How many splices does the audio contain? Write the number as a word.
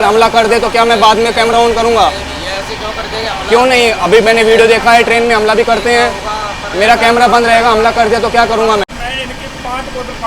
one